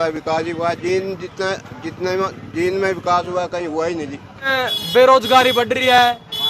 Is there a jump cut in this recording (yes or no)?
yes